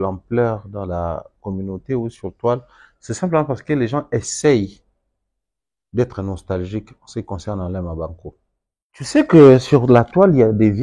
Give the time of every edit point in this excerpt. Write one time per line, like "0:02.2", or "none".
0:09.1